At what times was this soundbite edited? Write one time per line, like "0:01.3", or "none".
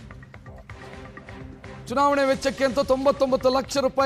0:01.8